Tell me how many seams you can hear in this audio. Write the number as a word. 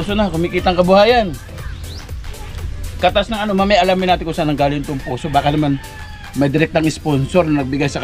zero